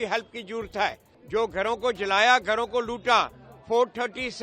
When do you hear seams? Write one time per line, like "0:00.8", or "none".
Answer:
0:01.1